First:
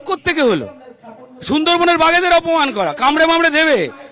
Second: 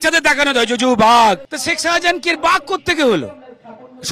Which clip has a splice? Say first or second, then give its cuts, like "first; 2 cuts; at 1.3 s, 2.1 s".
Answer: second; 1 cut; at 1.5 s